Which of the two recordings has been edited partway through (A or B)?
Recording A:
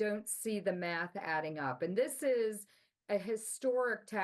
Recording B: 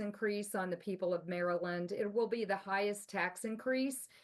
A